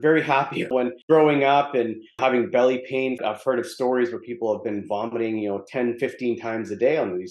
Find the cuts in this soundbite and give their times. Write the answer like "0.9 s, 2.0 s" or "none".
0.8 s, 2.2 s